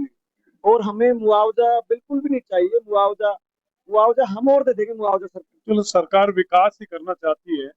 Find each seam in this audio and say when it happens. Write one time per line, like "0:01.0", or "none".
0:05.3